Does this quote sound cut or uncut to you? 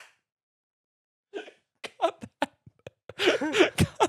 uncut